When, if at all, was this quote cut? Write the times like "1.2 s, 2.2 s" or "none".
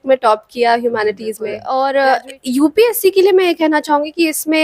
1.8 s